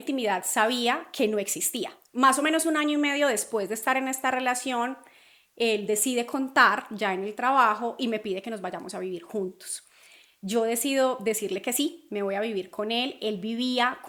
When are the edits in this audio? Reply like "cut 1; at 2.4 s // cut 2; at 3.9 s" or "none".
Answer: none

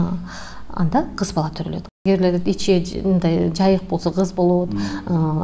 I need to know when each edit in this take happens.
cut 1; at 2.0 s

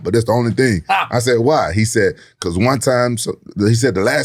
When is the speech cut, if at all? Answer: none

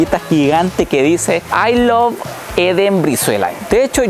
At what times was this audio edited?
none

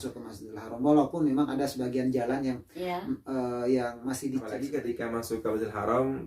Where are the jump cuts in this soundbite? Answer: cut 1; at 4.6 s

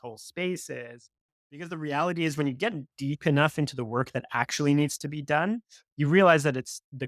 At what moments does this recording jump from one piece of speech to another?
cut 1; at 1.6 s

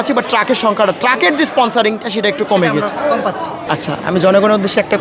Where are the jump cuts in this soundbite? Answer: cut 1; at 3.5 s

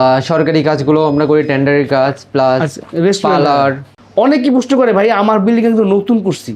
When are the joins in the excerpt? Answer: cut 1; at 2.8 s // cut 2; at 3.9 s

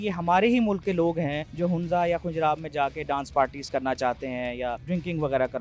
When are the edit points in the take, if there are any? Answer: cut 1; at 1.4 s // cut 2; at 4.8 s

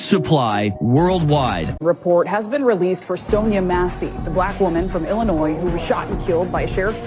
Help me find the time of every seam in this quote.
cut 1; at 1.7 s

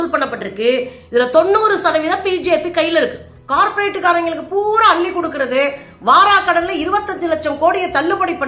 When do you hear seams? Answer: cut 1; at 3.3 s

